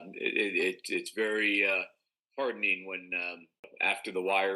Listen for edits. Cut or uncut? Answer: cut